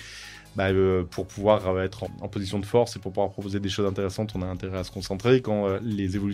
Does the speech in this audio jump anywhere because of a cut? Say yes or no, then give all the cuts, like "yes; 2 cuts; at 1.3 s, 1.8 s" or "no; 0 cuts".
yes; 1 cut; at 2.0 s